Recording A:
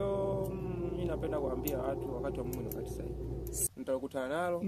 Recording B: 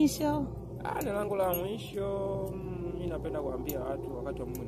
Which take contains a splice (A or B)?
A